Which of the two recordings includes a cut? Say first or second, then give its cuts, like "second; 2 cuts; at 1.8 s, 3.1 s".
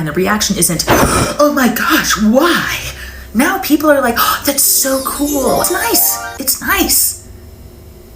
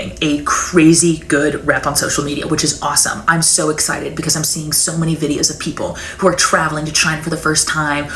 first; 1 cut; at 5.6 s